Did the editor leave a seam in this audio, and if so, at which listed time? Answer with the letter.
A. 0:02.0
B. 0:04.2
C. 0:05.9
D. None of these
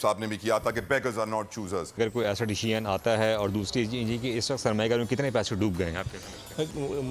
A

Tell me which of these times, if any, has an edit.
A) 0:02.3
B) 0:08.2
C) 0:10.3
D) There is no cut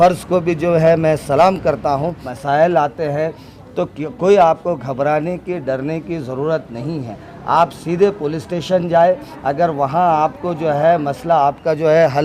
A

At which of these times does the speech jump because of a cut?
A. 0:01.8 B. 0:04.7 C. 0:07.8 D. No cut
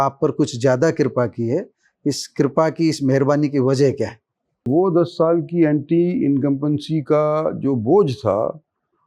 B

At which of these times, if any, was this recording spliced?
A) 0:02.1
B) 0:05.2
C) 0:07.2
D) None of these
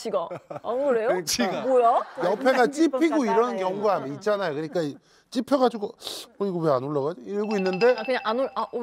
A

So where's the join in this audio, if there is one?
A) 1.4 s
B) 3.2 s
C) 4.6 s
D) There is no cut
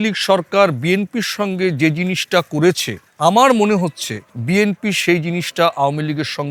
D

